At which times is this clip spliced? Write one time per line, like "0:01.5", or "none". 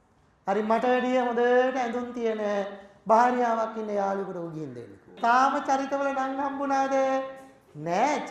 0:05.1